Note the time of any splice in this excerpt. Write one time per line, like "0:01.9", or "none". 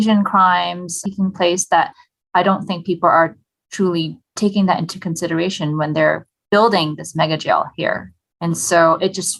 none